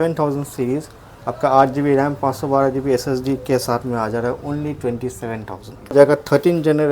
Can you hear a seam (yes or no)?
yes